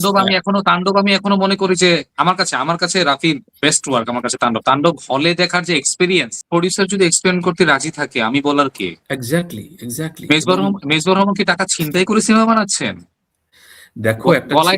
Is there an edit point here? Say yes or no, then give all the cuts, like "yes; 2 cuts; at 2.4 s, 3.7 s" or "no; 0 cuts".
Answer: yes; 1 cut; at 6.4 s